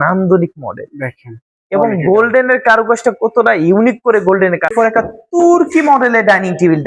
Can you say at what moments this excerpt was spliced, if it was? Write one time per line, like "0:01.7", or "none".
0:04.7